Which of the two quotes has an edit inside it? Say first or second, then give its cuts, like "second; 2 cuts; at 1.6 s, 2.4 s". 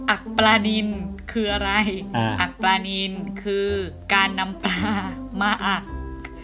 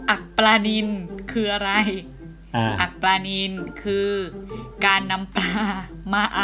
first; 2 cuts; at 2.0 s, 4.0 s